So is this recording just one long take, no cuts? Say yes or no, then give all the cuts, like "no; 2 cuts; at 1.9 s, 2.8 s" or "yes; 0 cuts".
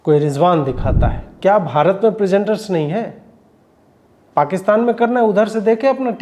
no; 1 cut; at 1.3 s